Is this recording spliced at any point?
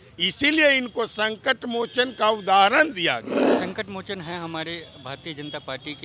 yes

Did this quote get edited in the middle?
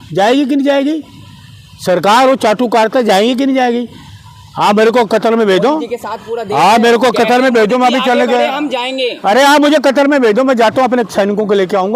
no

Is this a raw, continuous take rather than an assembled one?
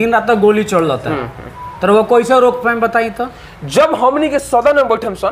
yes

